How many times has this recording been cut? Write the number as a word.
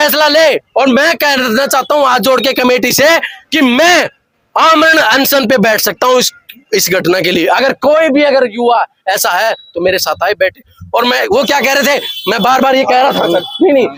zero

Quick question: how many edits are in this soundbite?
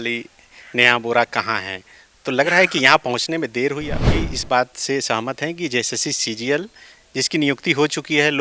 one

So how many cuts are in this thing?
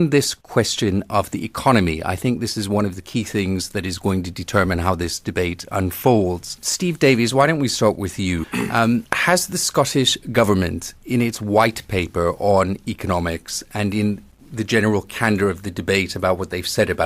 one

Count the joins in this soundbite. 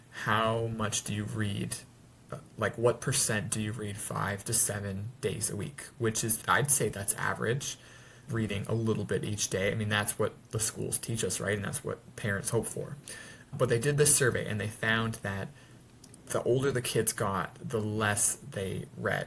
zero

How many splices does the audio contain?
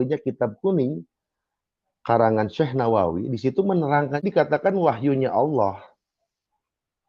one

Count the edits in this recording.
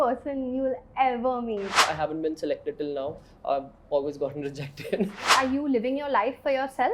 two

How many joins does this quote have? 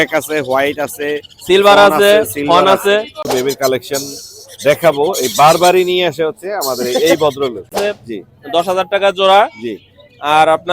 two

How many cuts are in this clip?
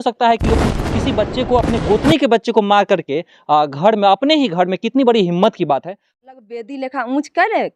one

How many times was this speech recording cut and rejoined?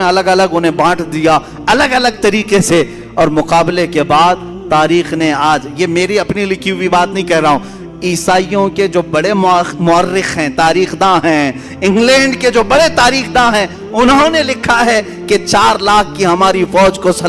zero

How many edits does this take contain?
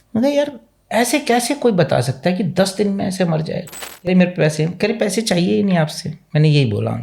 one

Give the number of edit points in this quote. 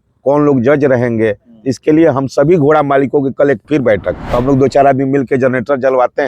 one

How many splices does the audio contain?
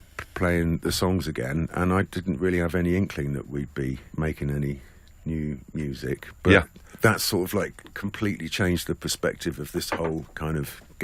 one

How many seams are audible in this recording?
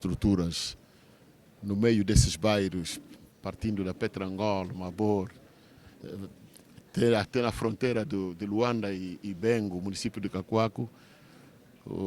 zero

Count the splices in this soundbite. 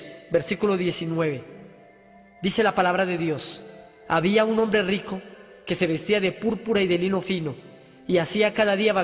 zero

